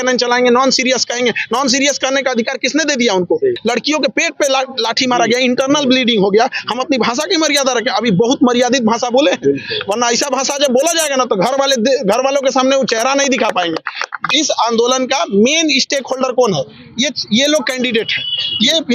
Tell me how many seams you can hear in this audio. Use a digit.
2